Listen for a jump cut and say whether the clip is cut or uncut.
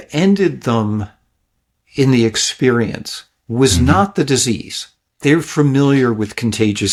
uncut